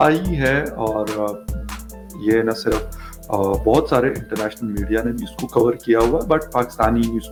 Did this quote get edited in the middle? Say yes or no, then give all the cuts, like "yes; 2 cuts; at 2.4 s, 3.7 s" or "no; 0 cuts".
no; 0 cuts